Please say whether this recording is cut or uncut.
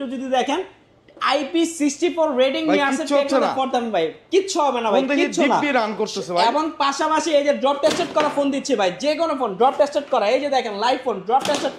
uncut